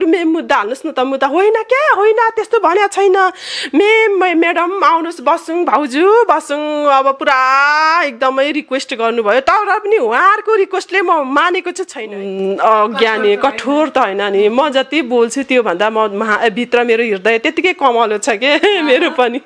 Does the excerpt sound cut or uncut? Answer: cut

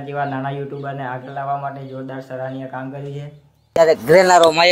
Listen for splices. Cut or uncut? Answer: cut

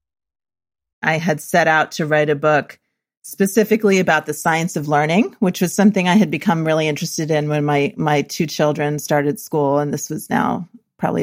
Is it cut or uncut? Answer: cut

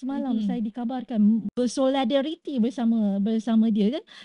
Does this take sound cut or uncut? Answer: cut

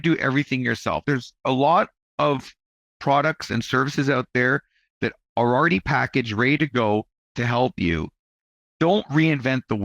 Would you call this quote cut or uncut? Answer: cut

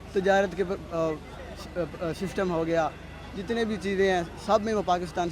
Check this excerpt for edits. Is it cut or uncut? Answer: uncut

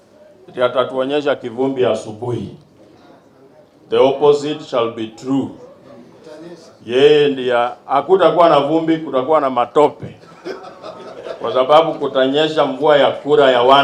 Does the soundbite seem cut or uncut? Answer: uncut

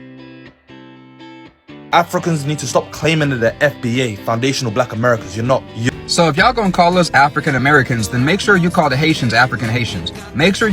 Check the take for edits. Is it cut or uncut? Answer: cut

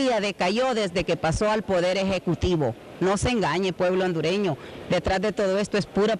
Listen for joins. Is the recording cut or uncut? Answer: cut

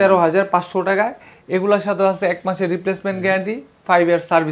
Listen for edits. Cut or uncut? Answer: uncut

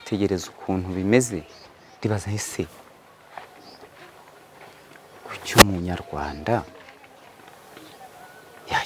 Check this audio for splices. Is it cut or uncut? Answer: uncut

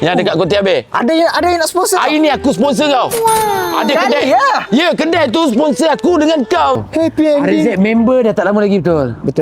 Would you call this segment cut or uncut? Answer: cut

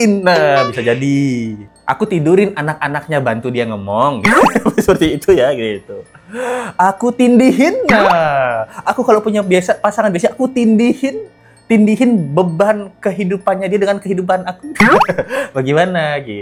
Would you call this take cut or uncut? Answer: uncut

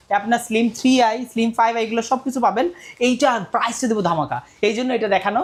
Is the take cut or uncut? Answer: uncut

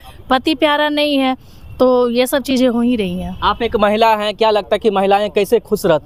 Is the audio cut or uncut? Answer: uncut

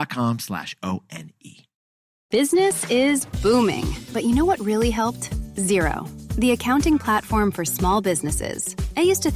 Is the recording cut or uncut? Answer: cut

